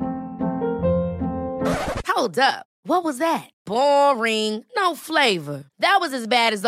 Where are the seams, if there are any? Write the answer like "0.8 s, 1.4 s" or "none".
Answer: none